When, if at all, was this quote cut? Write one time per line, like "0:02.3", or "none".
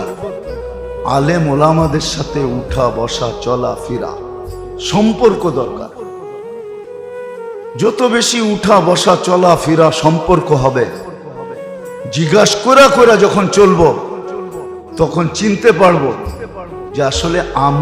0:05.9
0:07.7